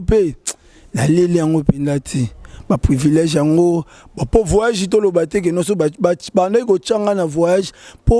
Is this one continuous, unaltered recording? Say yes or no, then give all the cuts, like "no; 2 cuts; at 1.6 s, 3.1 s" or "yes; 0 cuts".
yes; 0 cuts